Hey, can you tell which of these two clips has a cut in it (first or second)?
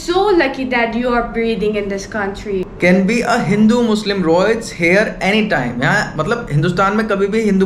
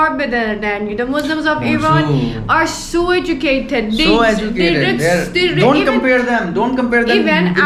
first